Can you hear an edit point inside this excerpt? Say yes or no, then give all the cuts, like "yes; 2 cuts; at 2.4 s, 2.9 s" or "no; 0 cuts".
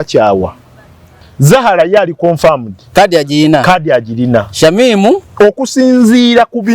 yes; 1 cut; at 1.2 s